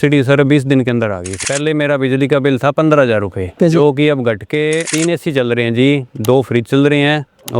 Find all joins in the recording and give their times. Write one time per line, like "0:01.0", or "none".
0:01.4
0:04.9

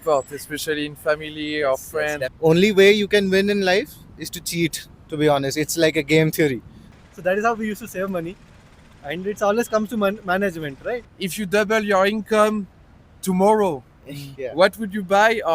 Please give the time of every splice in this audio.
0:02.3
0:06.9
0:11.1

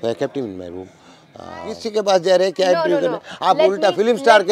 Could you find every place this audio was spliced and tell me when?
0:01.8

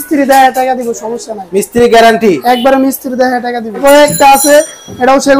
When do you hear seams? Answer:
0:03.8

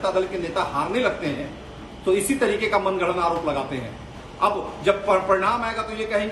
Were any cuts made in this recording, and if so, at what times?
none

